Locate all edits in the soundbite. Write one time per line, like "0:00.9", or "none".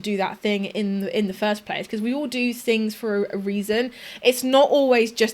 none

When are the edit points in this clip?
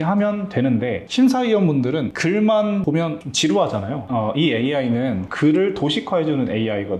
0:01.0
0:02.1
0:03.1
0:04.0

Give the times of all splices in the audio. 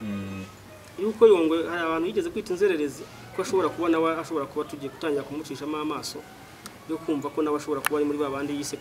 none

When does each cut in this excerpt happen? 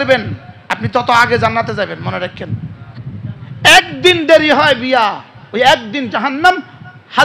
0:03.0

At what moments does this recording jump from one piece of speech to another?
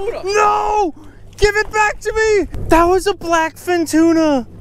0:02.6

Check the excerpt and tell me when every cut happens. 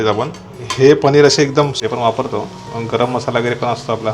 0:01.8

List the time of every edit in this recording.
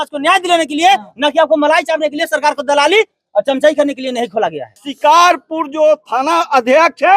0:04.9

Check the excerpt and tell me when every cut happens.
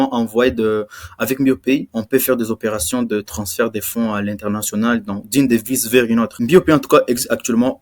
0:01.9
0:06.4

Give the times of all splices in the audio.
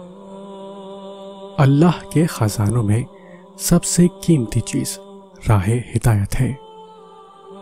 0:01.5
0:06.7

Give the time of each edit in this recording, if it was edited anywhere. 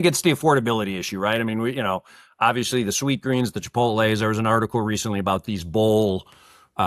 none

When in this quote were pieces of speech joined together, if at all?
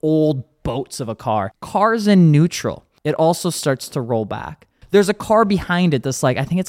0:01.6
0:02.9
0:04.8

